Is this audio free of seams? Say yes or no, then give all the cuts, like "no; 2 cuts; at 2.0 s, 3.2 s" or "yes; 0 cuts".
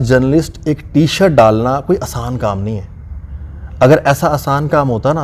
yes; 0 cuts